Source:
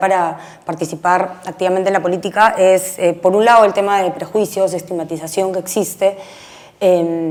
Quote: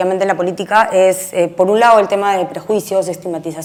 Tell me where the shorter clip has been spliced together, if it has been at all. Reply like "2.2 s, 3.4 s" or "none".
none